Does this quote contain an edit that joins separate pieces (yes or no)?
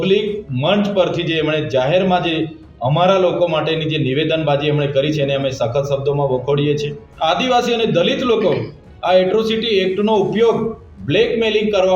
yes